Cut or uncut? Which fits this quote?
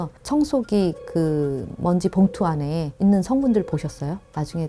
cut